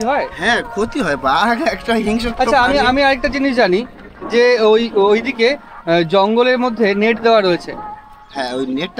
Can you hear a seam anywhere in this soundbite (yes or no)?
no